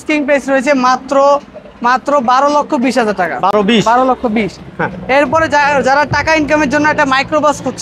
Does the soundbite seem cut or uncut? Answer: uncut